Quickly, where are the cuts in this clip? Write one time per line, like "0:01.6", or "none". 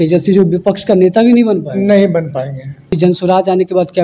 0:03.0

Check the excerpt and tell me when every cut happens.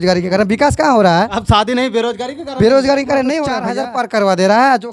0:03.6

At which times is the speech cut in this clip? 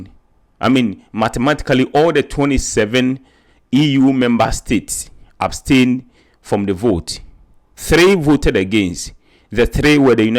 none

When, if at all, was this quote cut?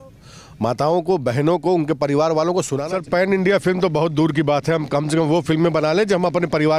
0:02.8

